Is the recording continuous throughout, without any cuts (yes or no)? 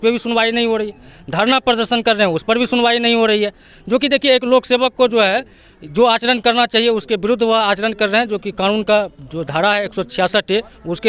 yes